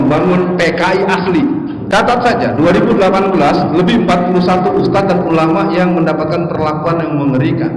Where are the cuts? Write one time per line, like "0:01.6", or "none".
0:01.8